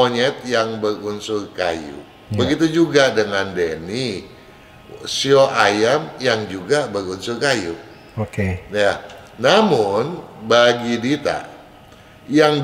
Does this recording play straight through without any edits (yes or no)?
yes